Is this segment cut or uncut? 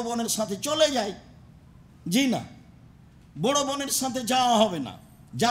uncut